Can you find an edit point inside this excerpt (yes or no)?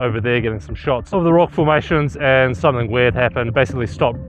yes